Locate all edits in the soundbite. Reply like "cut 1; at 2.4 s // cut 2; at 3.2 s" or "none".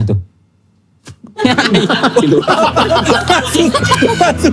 cut 1; at 2.7 s